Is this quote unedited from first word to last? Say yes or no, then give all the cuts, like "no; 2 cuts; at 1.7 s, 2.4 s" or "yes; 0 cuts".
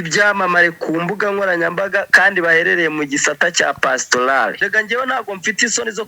no; 1 cut; at 4.6 s